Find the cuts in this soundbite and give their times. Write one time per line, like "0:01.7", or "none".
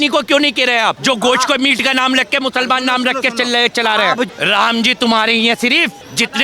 0:01.0
0:04.3